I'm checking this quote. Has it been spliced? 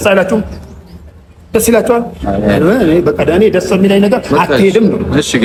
no; 0 cuts

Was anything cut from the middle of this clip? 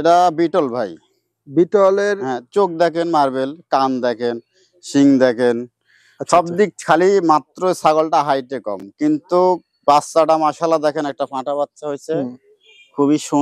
no; 0 cuts

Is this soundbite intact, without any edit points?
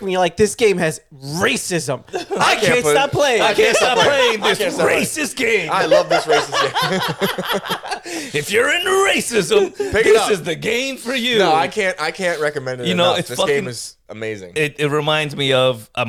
yes; 0 cuts

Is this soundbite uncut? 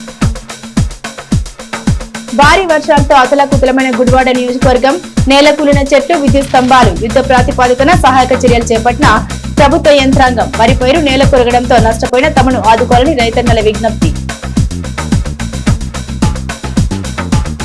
no; 1 cut; at 0.9 s

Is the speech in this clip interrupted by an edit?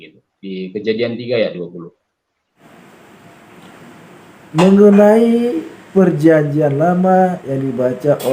yes; 1 cut; at 2.6 s

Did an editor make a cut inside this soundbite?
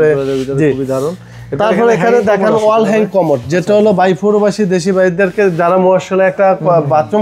no; 0 cuts

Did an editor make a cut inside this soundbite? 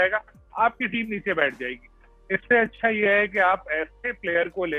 no; 0 cuts

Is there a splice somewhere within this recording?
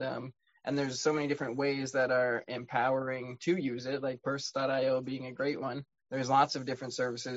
yes; 1 cut; at 5.9 s

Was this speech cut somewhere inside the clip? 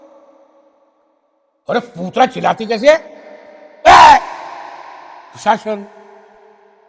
no; 0 cuts

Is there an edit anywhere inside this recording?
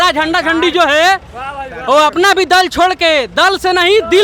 no; 0 cuts

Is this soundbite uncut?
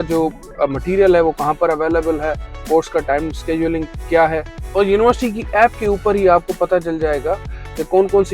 yes; 0 cuts

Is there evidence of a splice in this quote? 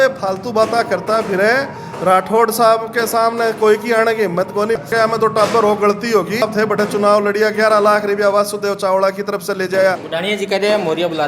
yes; 3 cuts; at 4.9 s, 6.4 s, 10.1 s

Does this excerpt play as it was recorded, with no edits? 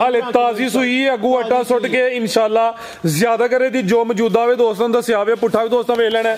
yes; 0 cuts

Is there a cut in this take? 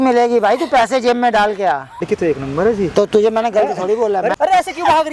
yes; 2 cuts; at 2.0 s, 4.3 s

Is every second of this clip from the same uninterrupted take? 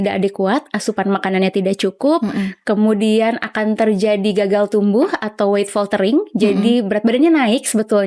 yes; 0 cuts

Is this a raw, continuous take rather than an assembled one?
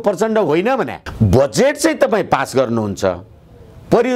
yes; 0 cuts

